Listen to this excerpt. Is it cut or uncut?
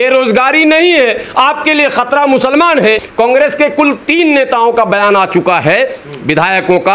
cut